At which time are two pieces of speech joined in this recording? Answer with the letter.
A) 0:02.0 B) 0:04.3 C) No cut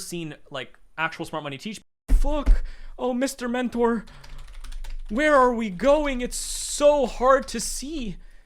A